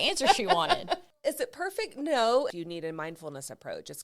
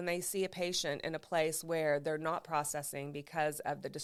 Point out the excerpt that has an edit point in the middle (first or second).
first